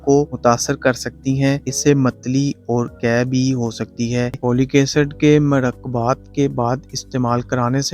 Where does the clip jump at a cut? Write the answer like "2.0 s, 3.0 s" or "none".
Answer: 4.4 s